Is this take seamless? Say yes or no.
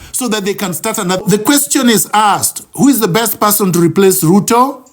no